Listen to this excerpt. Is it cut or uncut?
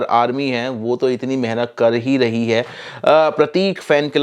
uncut